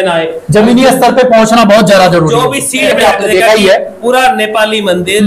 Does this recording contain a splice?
yes; 1 cut; at 3.0 s

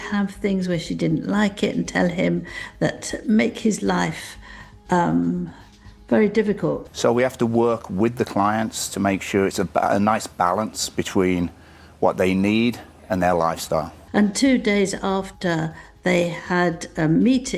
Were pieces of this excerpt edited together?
yes; 2 cuts; at 6.9 s, 14.0 s

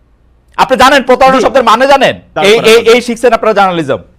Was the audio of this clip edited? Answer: yes; 1 cut; at 2.3 s

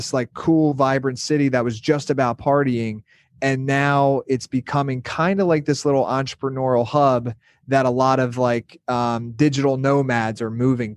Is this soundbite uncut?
yes; 0 cuts

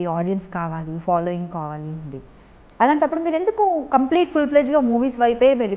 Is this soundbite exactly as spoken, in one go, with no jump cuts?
yes; 0 cuts

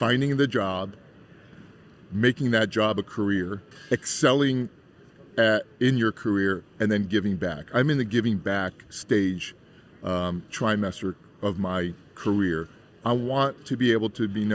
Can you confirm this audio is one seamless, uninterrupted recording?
no; 1 cut; at 12.8 s

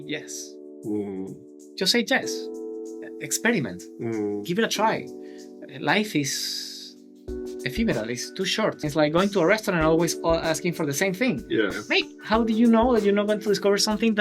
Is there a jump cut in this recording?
yes; 1 cut; at 8.9 s

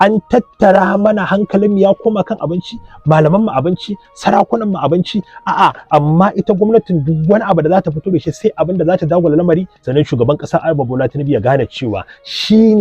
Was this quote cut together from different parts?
yes; 1 cut; at 9.8 s

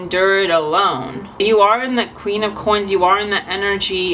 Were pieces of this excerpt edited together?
yes; 1 cut; at 1.2 s

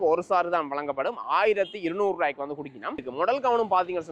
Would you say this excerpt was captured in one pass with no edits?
no; 1 cut; at 3.0 s

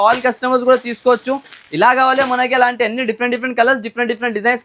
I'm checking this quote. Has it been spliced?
no; 0 cuts

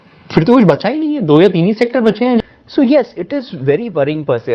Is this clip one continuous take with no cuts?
no; 1 cut; at 2.4 s

